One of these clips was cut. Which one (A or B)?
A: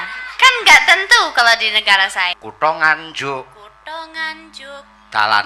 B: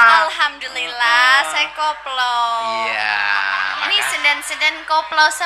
A